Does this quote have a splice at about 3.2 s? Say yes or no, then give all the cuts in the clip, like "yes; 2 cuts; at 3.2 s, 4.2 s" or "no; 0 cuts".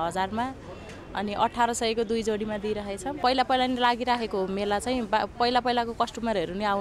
yes; 1 cut; at 3.2 s